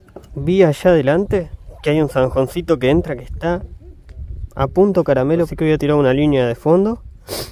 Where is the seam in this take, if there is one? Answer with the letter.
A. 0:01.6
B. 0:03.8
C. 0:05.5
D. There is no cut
C